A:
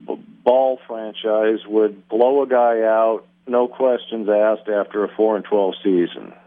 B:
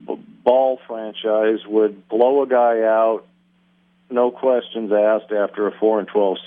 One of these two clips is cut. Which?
A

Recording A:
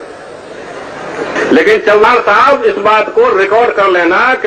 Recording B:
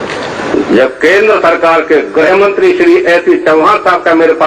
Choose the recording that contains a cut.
A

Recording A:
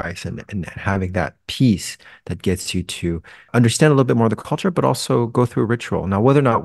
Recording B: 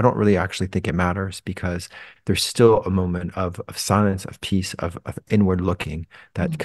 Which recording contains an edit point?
A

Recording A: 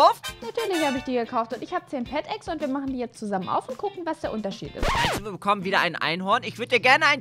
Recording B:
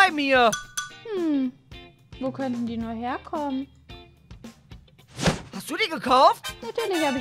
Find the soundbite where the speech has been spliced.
A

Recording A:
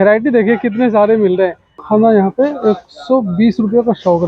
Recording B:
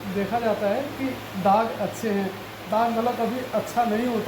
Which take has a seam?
A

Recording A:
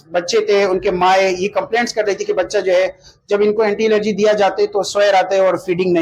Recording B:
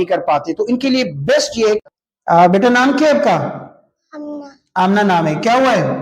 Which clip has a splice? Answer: B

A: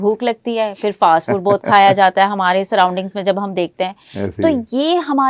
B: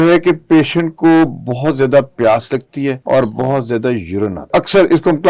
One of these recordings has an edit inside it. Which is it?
B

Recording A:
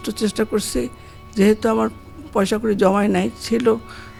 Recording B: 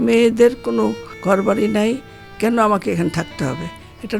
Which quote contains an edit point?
B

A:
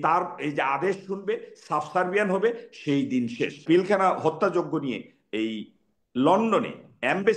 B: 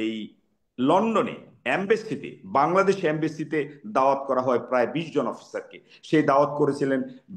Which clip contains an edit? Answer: A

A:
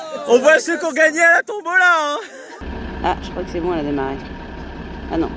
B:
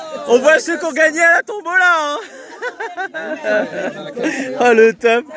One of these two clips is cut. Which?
A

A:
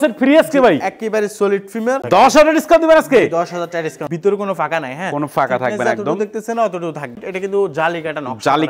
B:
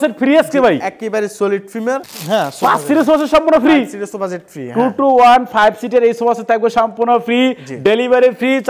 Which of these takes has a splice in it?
A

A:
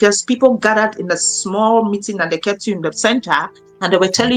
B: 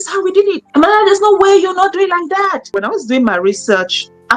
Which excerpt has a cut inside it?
B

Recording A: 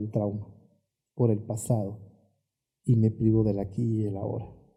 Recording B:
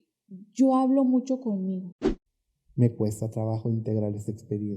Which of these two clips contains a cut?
B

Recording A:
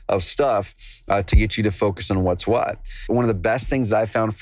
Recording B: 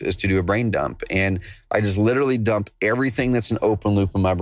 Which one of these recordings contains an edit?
A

